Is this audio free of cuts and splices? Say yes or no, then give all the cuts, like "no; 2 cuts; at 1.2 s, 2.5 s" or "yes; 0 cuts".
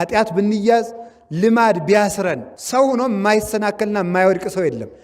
no; 1 cut; at 2.5 s